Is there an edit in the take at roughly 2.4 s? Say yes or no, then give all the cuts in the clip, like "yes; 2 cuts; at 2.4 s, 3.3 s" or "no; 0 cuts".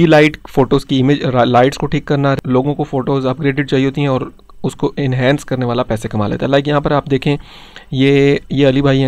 yes; 1 cut; at 2.4 s